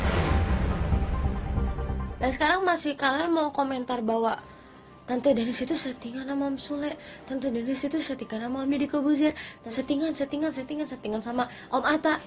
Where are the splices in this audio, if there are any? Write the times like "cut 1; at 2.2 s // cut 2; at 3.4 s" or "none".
cut 1; at 2.0 s

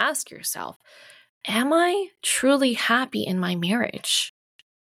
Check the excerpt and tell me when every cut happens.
none

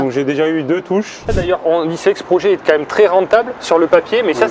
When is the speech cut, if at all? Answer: cut 1; at 1.4 s

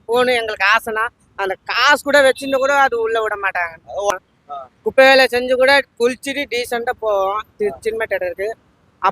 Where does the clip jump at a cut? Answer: cut 1; at 4.1 s

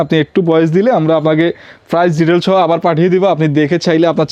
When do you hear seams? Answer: none

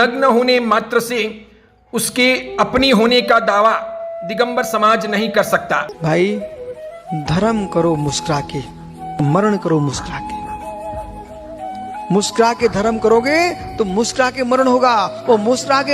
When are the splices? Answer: cut 1; at 5.9 s

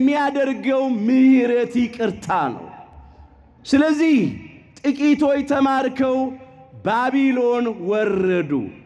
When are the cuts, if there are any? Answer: none

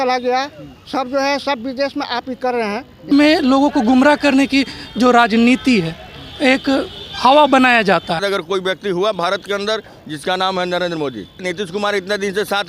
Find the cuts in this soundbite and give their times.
cut 1; at 3.1 s // cut 2; at 8.2 s // cut 3; at 11.4 s

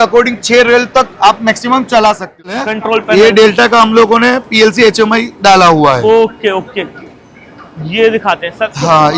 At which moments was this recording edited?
cut 1; at 2.6 s

